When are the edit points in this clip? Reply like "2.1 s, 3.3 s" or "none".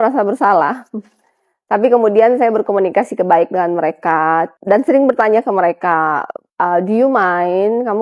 none

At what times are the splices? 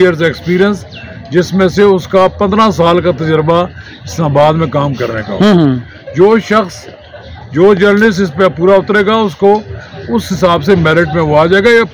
none

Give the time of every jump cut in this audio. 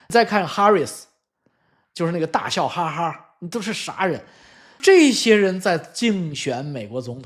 none

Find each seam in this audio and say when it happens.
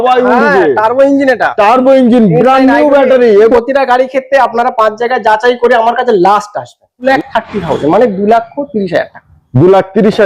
3.5 s, 7.0 s

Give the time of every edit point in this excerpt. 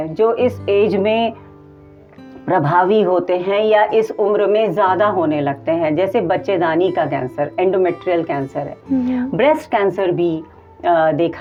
none

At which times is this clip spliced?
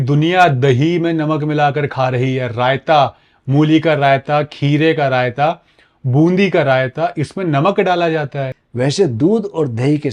8.5 s

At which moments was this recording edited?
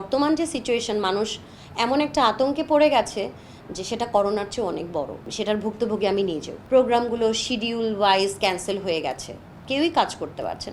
5.3 s, 6.5 s

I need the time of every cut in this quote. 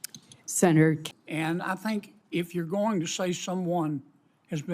1.0 s

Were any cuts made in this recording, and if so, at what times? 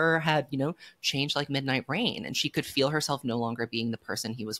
none

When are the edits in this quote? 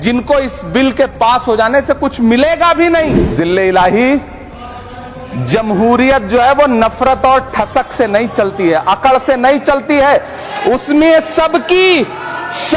3.2 s

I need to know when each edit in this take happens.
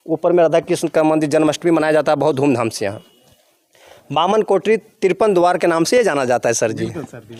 none

